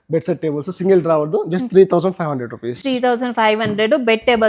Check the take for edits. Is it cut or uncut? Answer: uncut